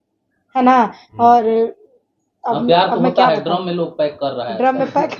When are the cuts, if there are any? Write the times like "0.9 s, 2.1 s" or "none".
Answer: none

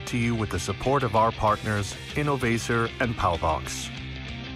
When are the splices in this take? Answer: 3.6 s

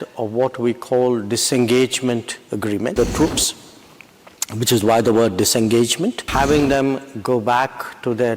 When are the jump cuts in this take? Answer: 2.9 s, 6.2 s

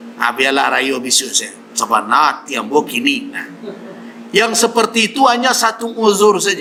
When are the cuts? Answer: none

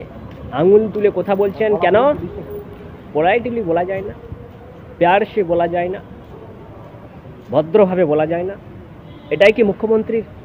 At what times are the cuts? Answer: none

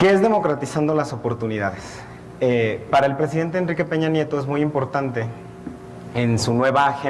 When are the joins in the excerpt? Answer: 3.9 s

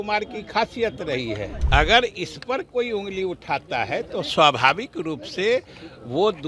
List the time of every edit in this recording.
1.5 s

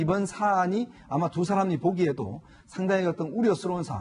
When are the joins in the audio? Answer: 2.1 s

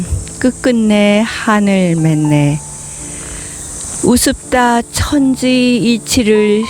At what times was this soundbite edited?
none

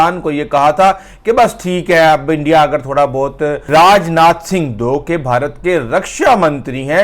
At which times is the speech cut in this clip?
3.7 s

